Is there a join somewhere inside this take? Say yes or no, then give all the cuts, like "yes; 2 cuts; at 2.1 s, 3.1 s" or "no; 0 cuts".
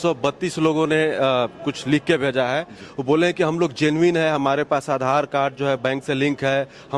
no; 0 cuts